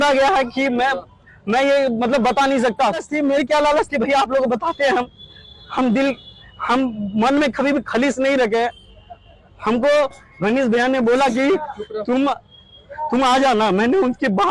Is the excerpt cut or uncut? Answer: cut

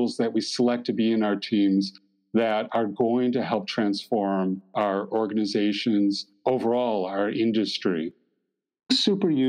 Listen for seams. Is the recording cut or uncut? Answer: cut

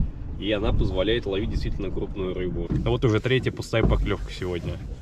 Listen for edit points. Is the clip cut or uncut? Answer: cut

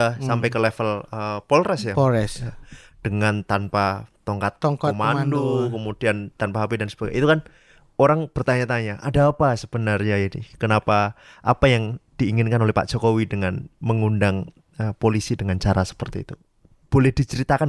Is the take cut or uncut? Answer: uncut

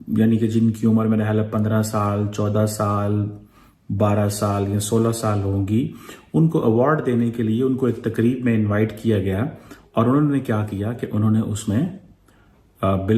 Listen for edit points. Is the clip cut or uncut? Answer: uncut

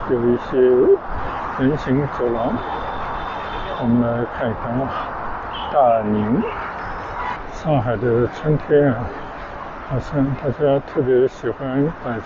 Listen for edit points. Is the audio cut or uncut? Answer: cut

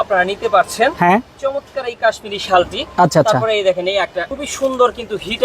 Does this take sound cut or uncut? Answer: cut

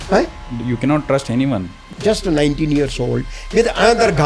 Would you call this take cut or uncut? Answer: cut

